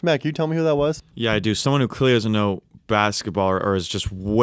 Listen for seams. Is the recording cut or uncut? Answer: uncut